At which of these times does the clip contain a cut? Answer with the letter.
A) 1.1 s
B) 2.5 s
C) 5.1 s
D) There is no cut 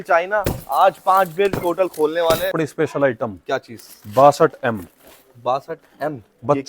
B